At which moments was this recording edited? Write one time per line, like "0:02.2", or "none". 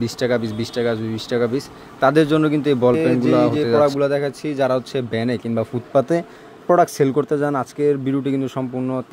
0:03.6